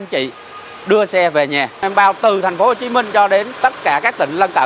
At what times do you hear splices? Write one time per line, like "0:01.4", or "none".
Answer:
0:01.9
0:03.5